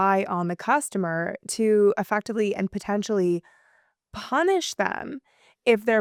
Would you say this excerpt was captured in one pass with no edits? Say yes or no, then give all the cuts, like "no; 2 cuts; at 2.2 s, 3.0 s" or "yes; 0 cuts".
yes; 0 cuts